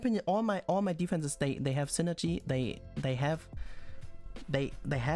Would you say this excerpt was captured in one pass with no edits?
yes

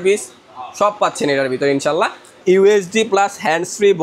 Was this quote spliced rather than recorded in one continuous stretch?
yes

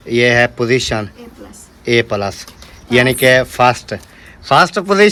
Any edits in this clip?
no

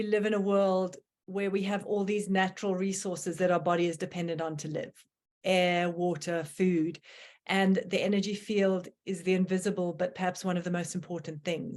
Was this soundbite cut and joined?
no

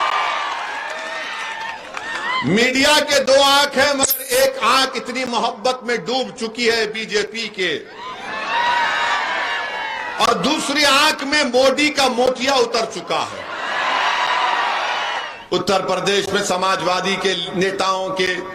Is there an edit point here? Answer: yes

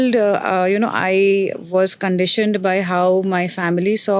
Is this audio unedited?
yes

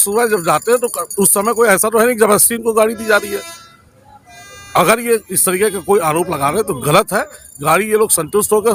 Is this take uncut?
yes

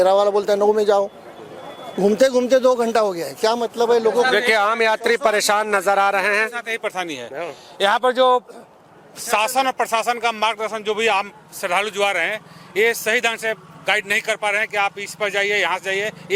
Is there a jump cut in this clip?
no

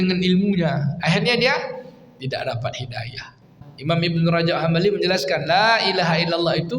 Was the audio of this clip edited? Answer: yes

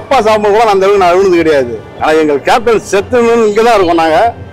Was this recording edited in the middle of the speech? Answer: yes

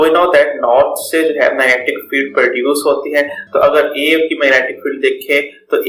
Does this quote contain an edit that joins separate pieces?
no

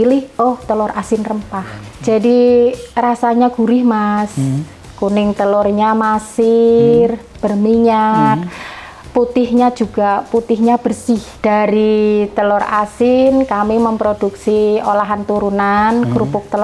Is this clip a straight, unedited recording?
no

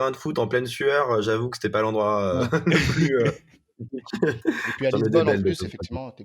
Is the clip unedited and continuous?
yes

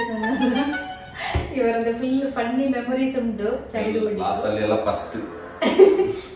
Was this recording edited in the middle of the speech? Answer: yes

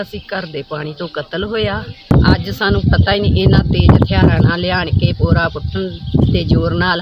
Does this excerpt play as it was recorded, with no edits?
no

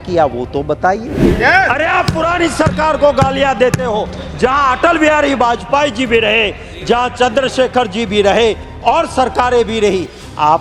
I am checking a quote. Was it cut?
no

